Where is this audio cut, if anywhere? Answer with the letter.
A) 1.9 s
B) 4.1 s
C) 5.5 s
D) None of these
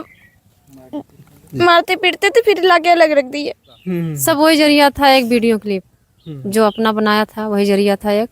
B